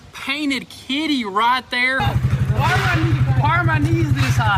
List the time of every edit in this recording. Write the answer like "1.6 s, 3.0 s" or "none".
2.0 s